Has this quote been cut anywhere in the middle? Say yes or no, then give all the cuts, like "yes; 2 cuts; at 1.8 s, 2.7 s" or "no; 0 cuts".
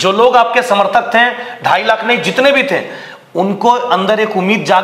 no; 0 cuts